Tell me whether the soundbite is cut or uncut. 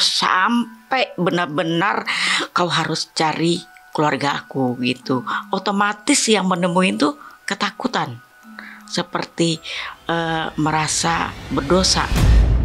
uncut